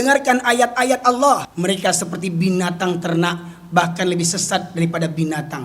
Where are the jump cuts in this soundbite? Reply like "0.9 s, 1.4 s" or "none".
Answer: 1.5 s